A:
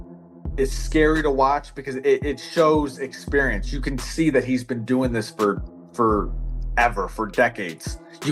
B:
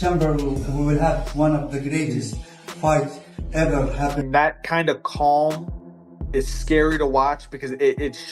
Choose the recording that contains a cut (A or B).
B